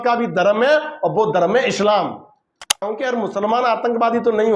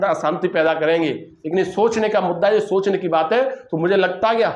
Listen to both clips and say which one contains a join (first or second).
first